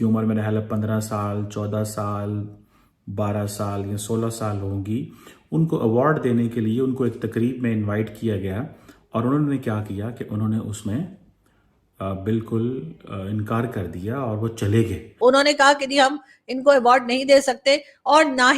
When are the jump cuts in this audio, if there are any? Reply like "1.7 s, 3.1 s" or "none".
15.0 s

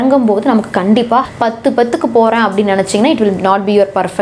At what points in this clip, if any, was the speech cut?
1.3 s

